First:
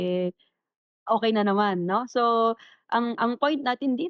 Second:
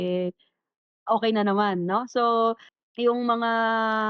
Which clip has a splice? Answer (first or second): second